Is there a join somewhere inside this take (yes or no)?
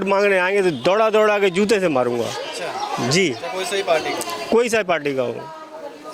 no